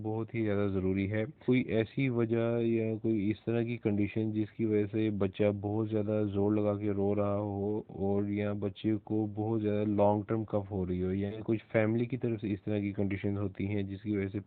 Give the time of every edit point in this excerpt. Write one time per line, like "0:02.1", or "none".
0:01.4
0:11.4